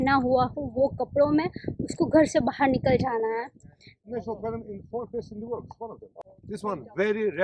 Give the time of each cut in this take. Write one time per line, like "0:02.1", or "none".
0:04.0
0:06.3

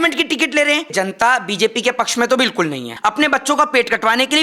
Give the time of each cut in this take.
0:00.9
0:02.9

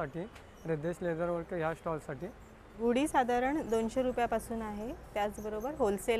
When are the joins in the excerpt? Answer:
0:02.7

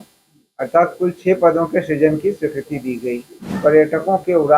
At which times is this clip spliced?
0:03.5

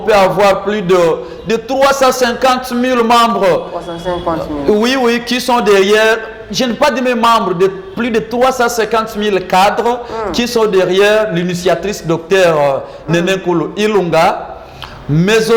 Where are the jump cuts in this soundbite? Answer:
none

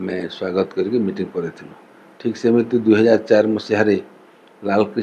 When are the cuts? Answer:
none

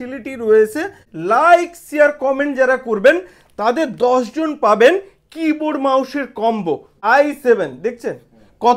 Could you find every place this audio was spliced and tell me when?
0:01.1
0:06.9

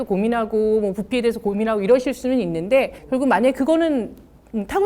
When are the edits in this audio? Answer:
0:03.0

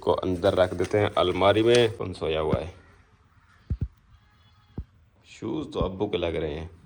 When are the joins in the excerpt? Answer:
0:02.0

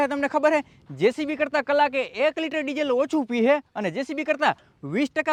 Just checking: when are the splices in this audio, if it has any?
none

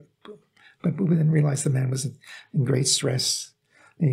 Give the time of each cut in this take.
none

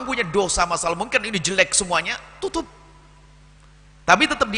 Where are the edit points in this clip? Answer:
none

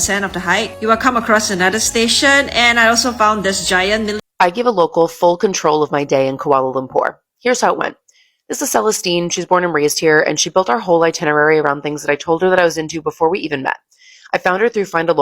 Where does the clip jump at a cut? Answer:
0:04.2

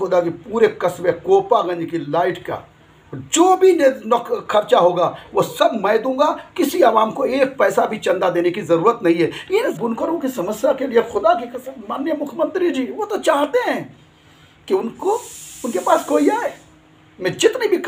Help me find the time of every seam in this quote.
0:09.7

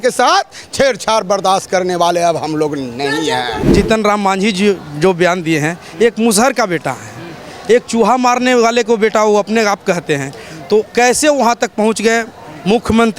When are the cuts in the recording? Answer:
0:03.7

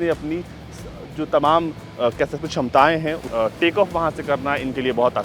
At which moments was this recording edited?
0:03.2

